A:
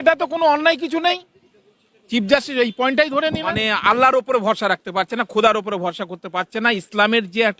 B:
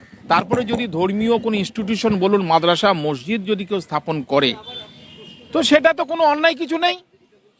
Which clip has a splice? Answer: A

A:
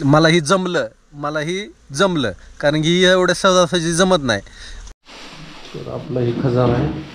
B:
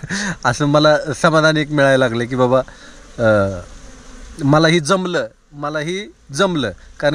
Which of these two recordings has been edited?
A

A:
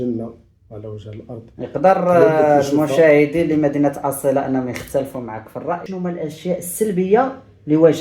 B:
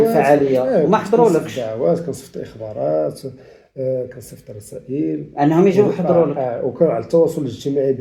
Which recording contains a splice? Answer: A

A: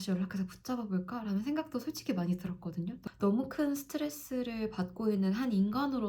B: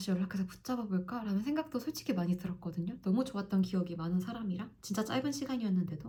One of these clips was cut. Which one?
A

